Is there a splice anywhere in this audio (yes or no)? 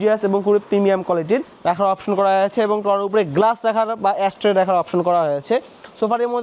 yes